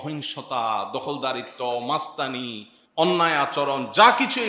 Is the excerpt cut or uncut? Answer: uncut